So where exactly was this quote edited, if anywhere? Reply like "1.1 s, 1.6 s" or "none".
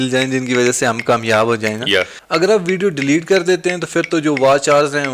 2.2 s